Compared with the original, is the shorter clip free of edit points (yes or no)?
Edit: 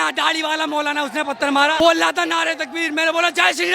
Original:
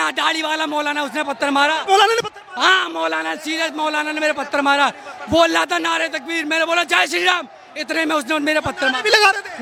no